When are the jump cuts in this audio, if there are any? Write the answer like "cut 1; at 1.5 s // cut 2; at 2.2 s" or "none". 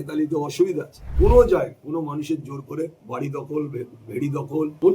cut 1; at 1.1 s // cut 2; at 1.8 s // cut 3; at 3.0 s // cut 4; at 4.3 s